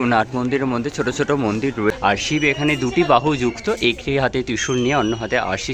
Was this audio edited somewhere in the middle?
yes; 1 cut; at 1.9 s

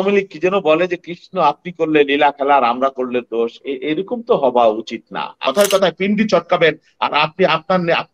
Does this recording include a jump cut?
yes; 1 cut; at 5.4 s

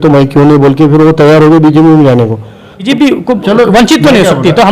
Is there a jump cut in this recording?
yes; 1 cut; at 2.8 s

